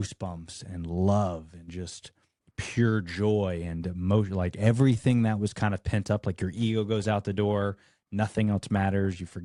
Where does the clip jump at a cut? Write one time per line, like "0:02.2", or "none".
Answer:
none